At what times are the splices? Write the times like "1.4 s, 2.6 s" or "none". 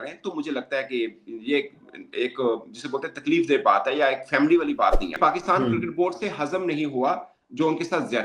5.2 s